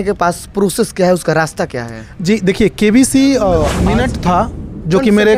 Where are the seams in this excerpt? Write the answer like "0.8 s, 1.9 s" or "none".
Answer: 3.8 s